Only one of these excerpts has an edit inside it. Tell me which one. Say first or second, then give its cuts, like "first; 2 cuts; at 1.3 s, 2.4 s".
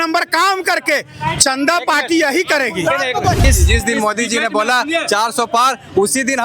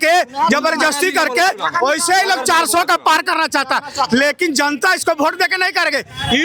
first; 1 cut; at 3.4 s